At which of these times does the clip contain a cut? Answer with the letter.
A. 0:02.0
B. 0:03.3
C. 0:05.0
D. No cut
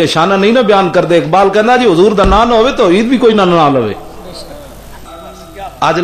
C